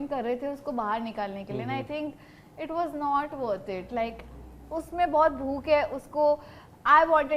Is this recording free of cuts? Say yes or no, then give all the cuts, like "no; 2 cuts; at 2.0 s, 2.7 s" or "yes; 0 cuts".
yes; 0 cuts